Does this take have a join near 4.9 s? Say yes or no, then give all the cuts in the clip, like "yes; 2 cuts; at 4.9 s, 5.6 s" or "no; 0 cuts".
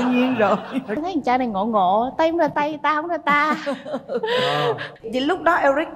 yes; 2 cuts; at 1.0 s, 4.9 s